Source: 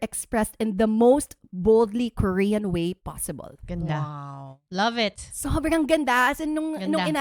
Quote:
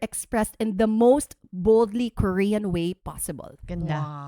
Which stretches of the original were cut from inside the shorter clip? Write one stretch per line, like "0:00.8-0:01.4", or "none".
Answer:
none